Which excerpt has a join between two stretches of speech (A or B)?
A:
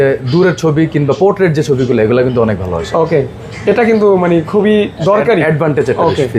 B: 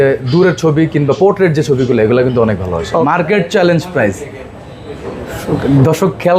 B